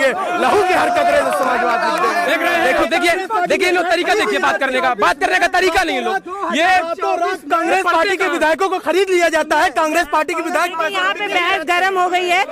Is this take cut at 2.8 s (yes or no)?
yes